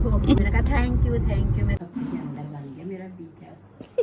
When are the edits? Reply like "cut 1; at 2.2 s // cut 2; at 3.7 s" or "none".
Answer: cut 1; at 1.8 s